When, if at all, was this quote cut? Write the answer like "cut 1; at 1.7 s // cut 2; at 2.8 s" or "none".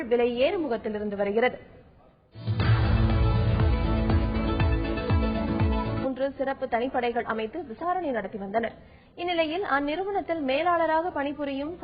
cut 1; at 6.1 s